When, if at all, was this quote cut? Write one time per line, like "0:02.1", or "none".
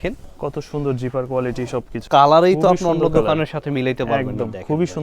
0:02.0